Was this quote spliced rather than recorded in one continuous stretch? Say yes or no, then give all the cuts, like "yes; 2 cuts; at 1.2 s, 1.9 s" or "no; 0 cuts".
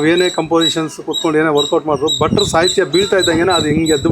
no; 0 cuts